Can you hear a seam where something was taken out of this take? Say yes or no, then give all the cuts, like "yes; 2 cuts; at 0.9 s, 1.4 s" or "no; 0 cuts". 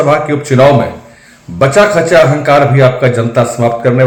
no; 0 cuts